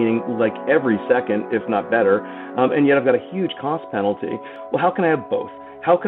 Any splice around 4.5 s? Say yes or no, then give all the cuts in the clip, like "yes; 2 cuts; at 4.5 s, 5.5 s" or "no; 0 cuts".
yes; 1 cut; at 4.5 s